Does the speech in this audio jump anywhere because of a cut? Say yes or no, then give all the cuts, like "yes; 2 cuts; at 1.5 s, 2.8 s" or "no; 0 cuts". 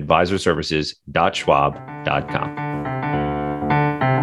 yes; 1 cut; at 2.4 s